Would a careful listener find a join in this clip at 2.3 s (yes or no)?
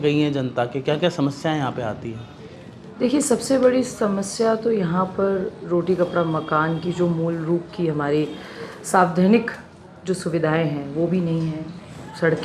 no